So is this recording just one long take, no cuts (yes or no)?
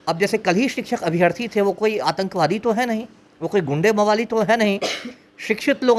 yes